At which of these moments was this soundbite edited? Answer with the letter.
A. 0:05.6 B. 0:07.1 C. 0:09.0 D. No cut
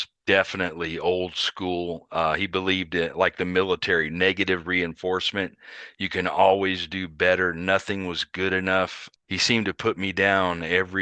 C